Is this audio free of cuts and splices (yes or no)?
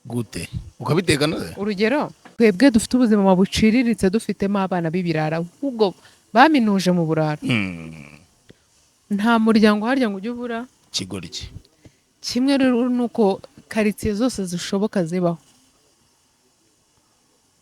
no